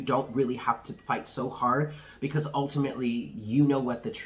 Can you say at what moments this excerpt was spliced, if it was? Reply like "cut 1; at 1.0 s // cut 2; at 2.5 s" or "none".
none